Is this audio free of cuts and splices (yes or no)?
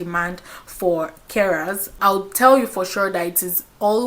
no